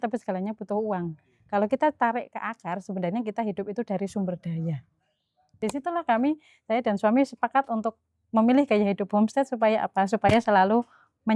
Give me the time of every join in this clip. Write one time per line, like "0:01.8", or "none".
0:05.5